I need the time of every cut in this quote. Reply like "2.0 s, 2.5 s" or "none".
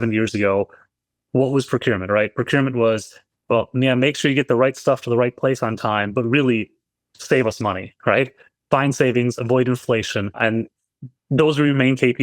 10.4 s